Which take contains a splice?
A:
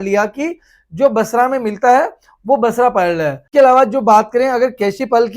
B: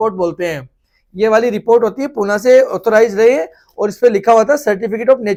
A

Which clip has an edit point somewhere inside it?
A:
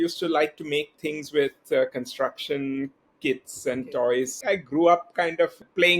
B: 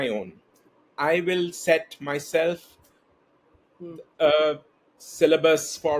A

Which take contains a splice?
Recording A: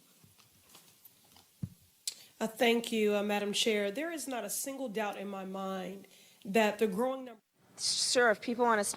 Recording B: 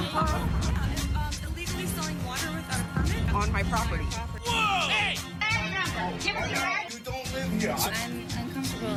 A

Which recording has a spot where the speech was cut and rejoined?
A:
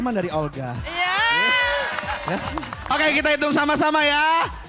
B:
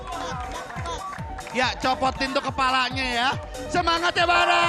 A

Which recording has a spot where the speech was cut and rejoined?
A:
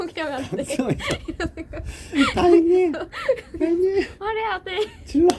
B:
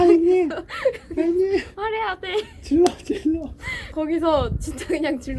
B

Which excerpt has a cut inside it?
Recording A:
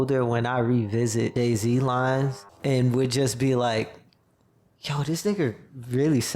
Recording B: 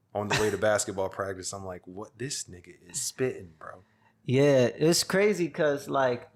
A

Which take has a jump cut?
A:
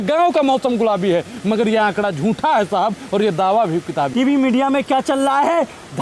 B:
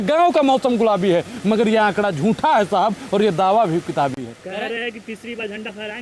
A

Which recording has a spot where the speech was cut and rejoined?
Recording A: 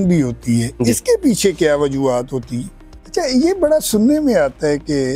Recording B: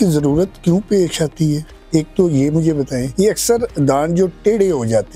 A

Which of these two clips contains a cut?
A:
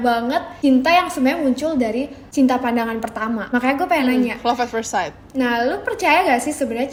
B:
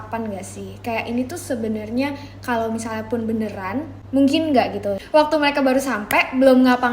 B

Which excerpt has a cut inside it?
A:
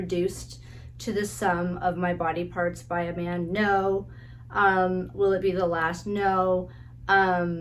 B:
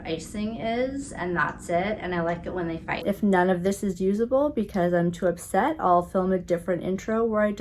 B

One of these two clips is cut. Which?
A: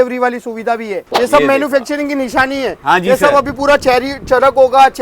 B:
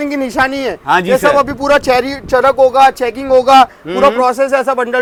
A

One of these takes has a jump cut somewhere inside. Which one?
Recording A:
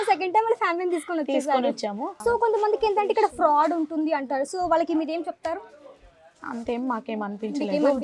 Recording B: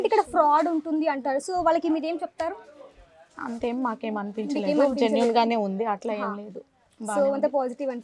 A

